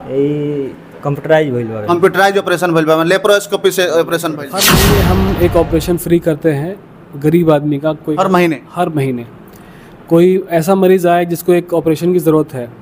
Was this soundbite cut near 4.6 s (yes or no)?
yes